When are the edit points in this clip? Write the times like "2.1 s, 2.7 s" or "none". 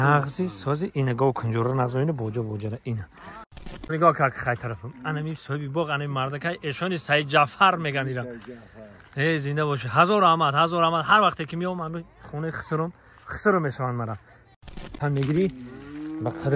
3.9 s, 14.9 s